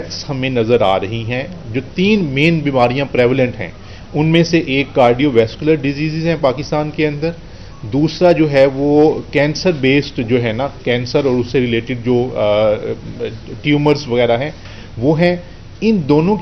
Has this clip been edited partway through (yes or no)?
no